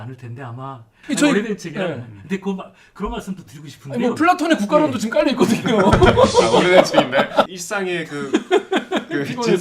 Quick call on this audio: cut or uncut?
cut